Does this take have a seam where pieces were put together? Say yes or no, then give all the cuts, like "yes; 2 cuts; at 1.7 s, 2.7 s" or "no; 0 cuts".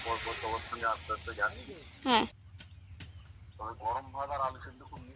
yes; 1 cut; at 2.4 s